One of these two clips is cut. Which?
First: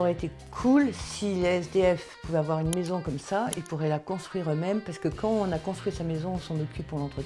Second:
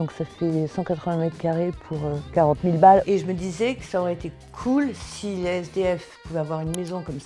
second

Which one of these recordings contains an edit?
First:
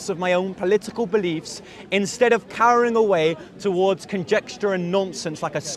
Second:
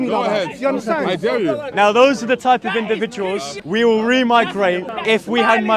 second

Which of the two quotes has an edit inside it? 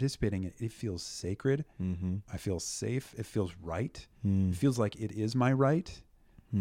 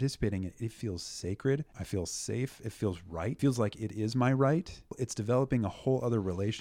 second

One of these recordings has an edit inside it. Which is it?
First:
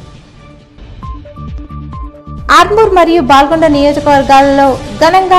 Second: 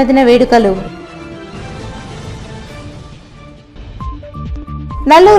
first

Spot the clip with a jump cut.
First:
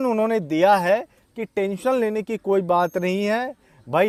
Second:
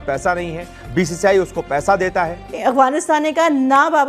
second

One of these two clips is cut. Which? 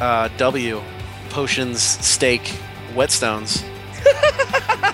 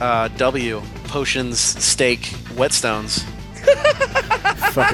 second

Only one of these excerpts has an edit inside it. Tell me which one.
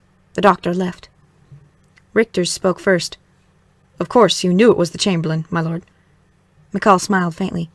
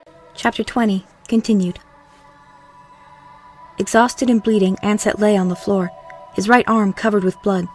first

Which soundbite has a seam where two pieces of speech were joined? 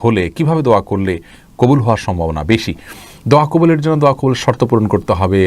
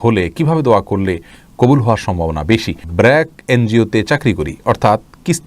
second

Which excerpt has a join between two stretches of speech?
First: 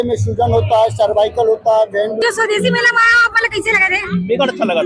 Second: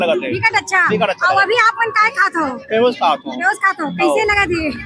first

